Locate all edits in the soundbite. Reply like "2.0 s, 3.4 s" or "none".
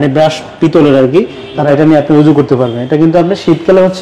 1.5 s